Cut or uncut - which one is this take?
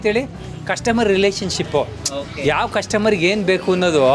uncut